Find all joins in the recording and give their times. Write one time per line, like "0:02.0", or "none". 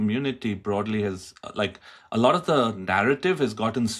none